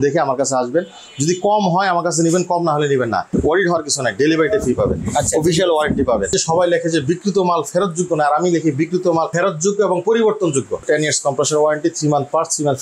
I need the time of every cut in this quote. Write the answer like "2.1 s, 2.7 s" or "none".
3.3 s, 6.3 s, 10.8 s